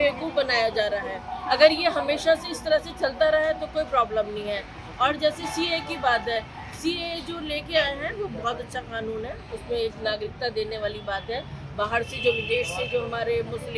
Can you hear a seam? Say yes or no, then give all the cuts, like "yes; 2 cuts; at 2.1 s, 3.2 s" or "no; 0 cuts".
no; 0 cuts